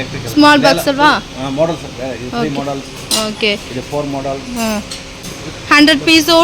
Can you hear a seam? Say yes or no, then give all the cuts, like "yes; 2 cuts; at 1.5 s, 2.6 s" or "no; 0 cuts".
yes; 1 cut; at 5.1 s